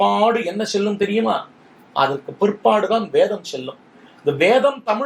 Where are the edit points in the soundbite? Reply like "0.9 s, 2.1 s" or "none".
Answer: none